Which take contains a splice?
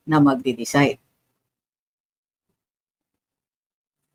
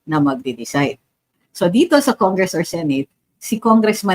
second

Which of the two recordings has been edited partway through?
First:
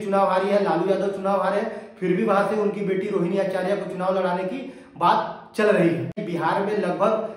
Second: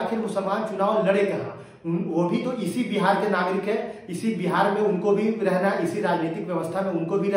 first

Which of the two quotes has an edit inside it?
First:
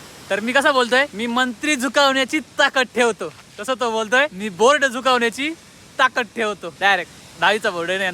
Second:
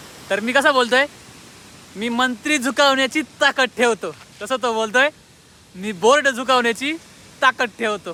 first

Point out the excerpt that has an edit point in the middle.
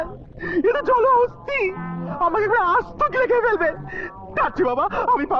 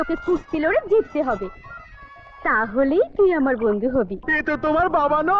second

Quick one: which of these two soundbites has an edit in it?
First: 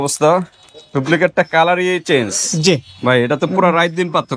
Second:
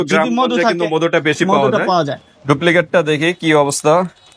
second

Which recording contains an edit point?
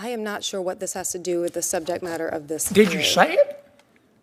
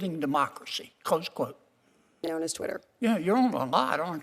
second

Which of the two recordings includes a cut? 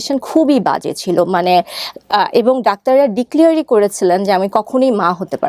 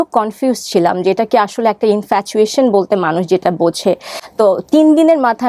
second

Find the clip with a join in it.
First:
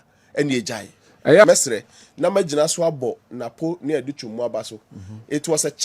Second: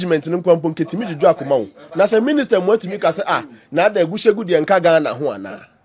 first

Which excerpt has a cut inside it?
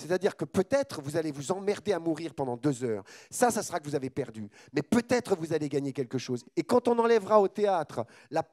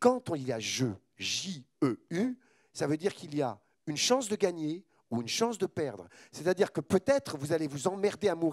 first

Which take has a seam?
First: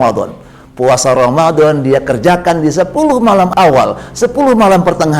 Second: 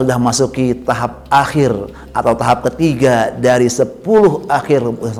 first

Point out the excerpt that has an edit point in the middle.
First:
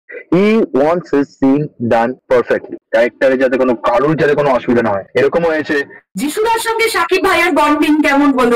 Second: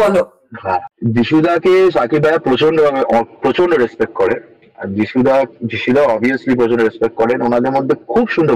first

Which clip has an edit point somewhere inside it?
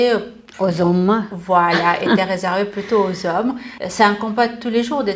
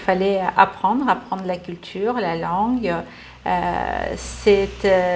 first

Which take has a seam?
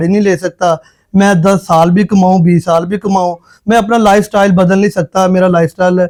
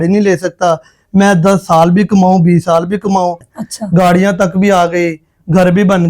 second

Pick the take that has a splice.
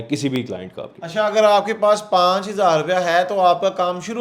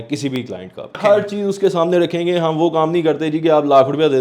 second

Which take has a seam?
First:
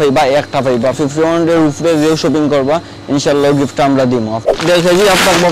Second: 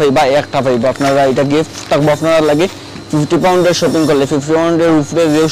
first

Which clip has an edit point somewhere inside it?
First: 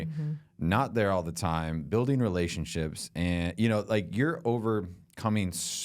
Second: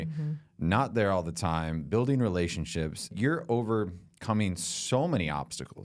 second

